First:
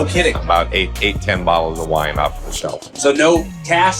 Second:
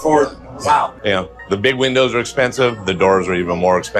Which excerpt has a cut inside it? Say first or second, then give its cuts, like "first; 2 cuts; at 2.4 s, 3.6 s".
first; 2 cuts; at 0.9 s, 2.9 s